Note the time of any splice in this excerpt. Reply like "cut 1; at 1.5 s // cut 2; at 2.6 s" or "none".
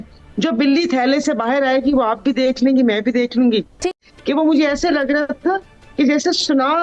cut 1; at 3.9 s